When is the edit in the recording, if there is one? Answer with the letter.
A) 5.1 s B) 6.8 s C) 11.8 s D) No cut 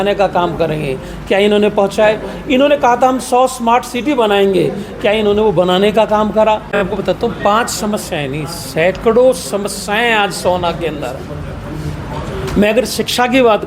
B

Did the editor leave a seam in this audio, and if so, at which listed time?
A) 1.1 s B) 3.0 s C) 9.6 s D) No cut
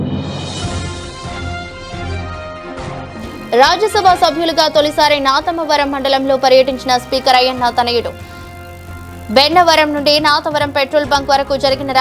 D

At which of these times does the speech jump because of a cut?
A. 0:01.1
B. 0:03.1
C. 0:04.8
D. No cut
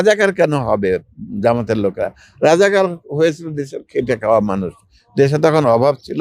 D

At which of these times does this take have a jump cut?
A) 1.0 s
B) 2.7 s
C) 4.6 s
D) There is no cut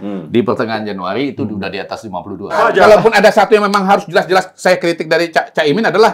B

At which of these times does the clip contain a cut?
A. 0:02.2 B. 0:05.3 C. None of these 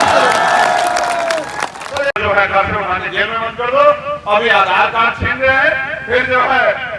A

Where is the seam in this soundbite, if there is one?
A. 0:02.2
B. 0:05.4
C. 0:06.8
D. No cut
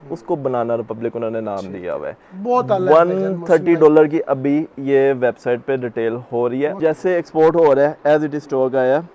C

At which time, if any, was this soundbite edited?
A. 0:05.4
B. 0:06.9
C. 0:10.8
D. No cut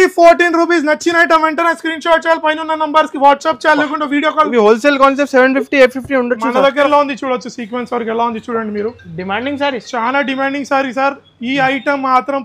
B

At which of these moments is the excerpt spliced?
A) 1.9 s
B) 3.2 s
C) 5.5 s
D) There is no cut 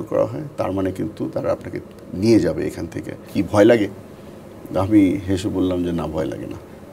B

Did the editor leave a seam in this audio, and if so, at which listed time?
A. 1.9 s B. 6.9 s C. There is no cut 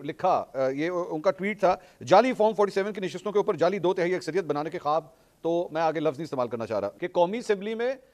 B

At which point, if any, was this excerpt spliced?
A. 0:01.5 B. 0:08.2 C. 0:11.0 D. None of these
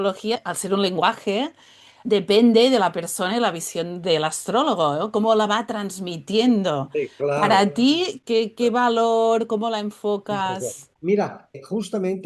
D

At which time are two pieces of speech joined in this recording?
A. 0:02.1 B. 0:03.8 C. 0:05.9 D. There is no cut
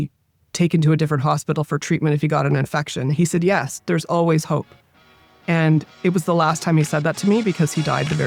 D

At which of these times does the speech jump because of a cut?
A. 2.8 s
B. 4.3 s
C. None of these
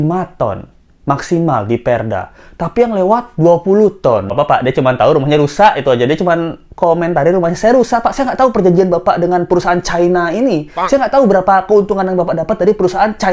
B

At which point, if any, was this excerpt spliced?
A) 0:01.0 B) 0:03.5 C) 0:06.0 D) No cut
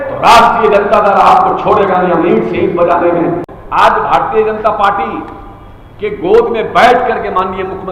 B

